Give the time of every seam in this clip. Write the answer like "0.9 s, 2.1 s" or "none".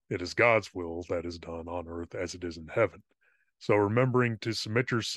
none